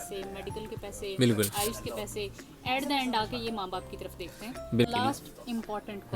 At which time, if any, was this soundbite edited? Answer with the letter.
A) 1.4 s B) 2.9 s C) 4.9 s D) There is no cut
C